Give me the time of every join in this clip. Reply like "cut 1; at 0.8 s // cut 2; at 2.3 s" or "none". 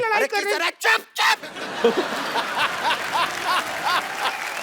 none